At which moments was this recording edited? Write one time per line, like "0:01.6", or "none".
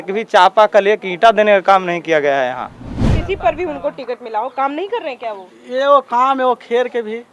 0:03.1